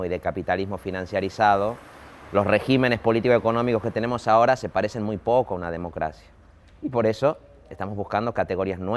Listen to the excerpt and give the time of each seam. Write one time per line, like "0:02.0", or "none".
0:01.0